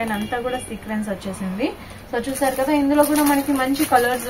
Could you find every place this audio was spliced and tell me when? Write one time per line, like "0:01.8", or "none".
none